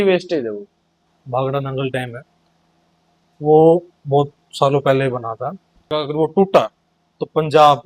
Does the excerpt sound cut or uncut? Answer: cut